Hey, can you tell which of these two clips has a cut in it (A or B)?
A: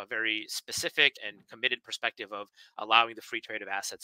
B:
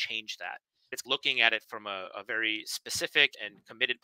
B